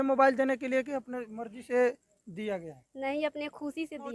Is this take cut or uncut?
uncut